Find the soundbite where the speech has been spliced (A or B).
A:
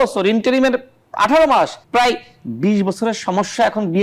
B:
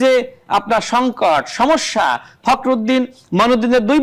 A